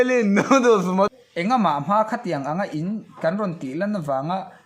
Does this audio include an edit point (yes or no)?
yes